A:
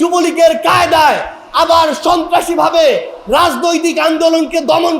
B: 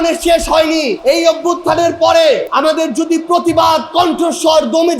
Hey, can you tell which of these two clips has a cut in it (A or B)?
B